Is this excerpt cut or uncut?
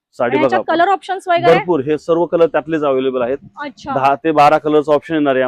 uncut